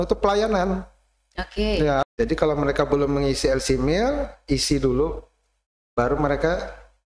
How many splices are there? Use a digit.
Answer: 1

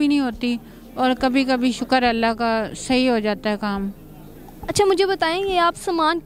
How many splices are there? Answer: 0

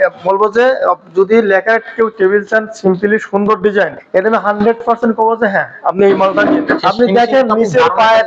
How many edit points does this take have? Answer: 2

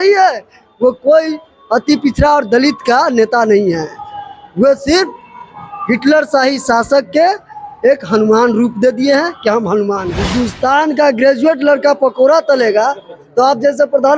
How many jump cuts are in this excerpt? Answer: 1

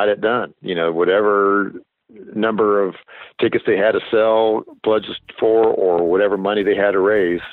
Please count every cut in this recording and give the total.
0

